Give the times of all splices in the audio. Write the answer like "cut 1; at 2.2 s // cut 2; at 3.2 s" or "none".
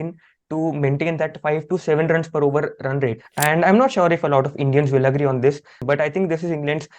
cut 1; at 3.3 s // cut 2; at 5.8 s